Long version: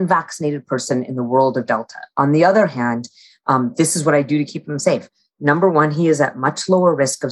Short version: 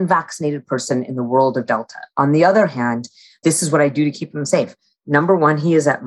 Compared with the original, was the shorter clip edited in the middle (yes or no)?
yes